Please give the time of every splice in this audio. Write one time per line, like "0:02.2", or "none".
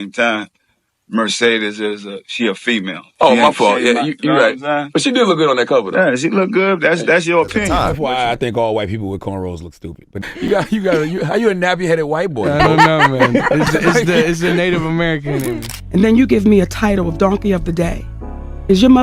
0:07.7
0:15.7